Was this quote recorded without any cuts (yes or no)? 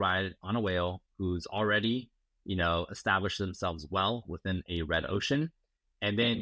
yes